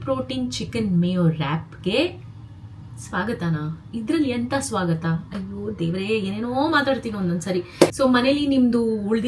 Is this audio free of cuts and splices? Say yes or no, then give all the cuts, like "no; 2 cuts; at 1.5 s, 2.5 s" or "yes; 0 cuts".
no; 1 cut; at 7.9 s